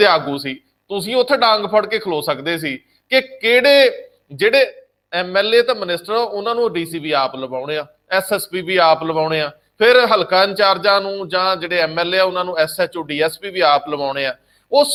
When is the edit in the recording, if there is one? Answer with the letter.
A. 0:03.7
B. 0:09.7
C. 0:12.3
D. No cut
D